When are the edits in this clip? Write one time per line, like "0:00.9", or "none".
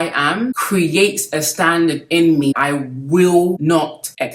0:02.6